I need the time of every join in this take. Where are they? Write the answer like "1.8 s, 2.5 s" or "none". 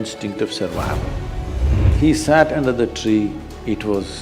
1.8 s